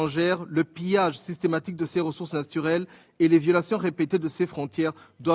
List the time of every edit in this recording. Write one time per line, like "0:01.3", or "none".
none